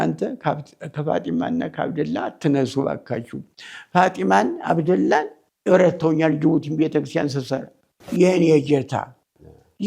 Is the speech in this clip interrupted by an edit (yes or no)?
yes